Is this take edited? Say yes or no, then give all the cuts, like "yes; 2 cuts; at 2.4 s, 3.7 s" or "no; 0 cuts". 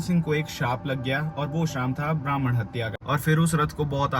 yes; 1 cut; at 3.0 s